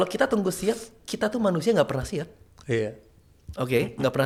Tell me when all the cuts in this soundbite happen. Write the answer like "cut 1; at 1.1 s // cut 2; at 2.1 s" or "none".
none